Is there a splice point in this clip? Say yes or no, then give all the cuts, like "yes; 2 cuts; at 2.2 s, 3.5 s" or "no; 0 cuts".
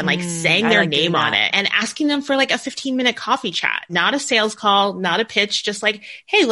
no; 0 cuts